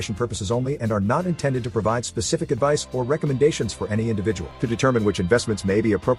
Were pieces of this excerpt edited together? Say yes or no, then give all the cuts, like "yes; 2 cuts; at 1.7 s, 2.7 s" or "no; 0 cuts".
no; 0 cuts